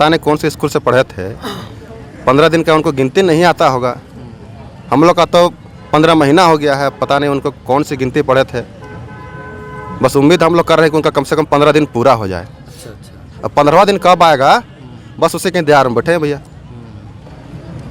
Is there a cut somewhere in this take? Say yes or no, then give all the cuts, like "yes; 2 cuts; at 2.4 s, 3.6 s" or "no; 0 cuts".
no; 0 cuts